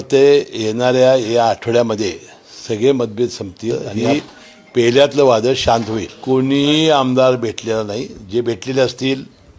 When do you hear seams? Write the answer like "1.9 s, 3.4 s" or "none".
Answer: 3.9 s, 6.1 s